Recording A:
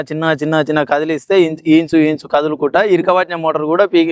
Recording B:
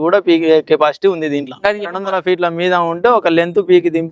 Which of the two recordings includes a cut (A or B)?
B